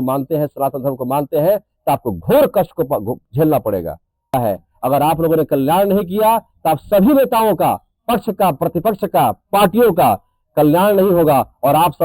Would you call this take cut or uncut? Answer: cut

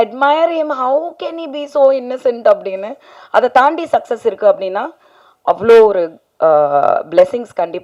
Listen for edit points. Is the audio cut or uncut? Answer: uncut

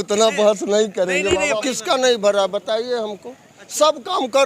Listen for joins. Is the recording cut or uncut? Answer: cut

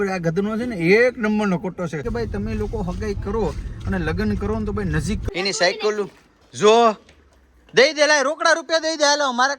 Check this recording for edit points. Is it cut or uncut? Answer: cut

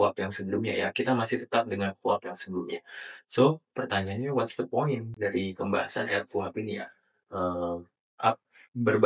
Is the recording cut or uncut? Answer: uncut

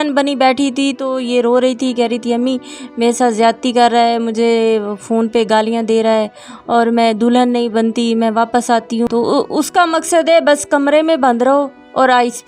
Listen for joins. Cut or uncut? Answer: cut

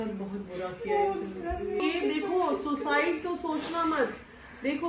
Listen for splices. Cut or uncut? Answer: cut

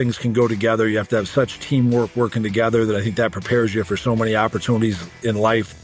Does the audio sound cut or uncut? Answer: uncut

